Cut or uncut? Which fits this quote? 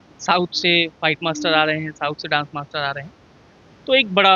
uncut